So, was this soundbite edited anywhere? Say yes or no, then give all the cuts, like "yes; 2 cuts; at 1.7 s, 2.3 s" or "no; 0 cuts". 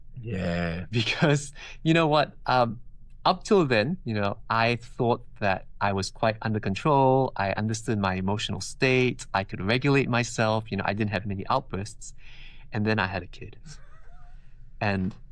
no; 0 cuts